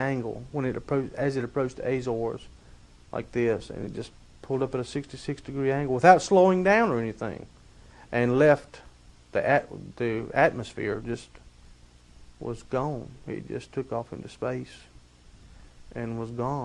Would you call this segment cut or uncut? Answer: uncut